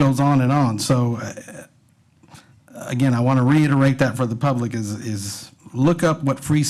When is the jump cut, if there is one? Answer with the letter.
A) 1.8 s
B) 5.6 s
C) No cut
C